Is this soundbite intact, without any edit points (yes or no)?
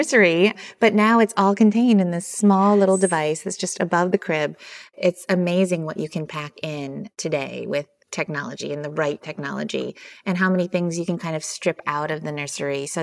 no